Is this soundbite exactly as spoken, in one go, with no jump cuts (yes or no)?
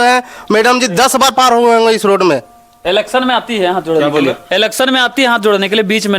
yes